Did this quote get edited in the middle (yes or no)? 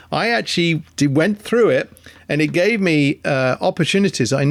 no